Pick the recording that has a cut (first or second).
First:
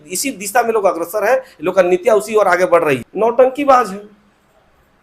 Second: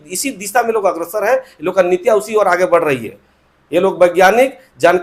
first